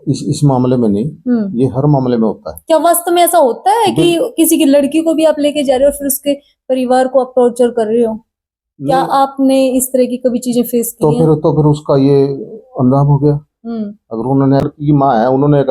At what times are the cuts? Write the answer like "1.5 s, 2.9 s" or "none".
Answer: 14.7 s